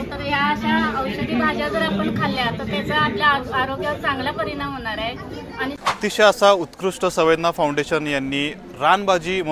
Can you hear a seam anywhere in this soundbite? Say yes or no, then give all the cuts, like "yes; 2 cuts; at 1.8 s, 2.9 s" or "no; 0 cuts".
yes; 1 cut; at 5.9 s